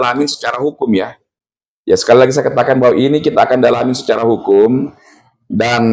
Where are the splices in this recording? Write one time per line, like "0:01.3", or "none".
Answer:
none